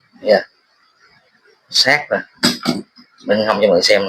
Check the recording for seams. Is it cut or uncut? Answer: uncut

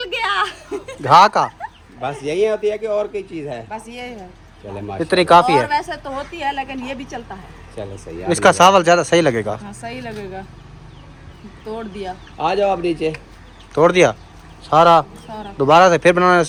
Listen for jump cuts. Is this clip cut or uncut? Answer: uncut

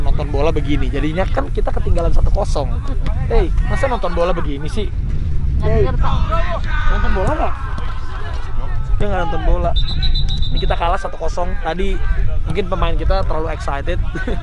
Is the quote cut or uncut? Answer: uncut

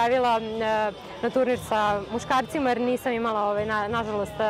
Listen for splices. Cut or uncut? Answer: uncut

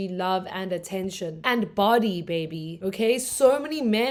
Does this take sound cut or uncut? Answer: uncut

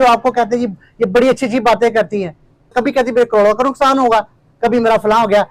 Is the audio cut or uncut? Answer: cut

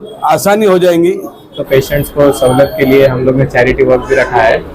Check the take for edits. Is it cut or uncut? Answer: cut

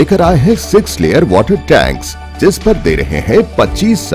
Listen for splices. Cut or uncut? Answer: uncut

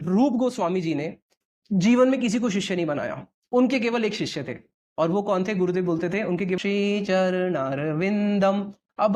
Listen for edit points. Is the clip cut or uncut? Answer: cut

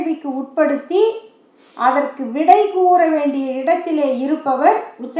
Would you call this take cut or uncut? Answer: uncut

